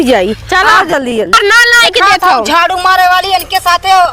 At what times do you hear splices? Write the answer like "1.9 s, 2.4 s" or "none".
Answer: 1.3 s